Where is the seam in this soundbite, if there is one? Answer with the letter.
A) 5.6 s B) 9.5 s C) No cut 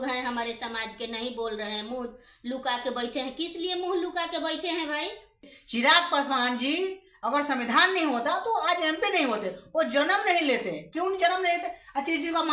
A